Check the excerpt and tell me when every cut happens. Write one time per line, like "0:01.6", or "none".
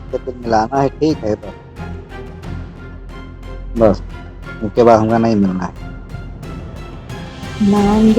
0:01.5
0:03.2